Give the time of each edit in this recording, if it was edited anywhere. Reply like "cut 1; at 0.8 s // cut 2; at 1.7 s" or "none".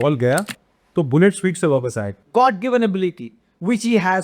cut 1; at 2.1 s